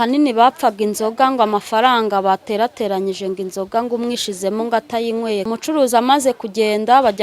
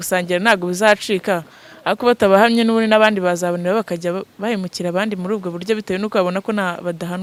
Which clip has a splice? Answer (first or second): first